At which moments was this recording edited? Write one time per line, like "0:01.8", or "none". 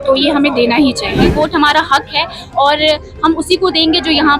0:01.3